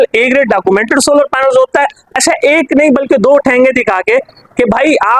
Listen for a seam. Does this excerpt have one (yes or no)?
yes